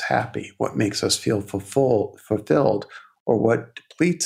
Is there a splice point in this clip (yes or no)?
no